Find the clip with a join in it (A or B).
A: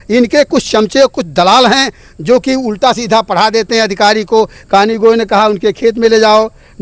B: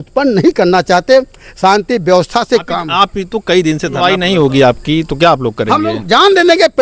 B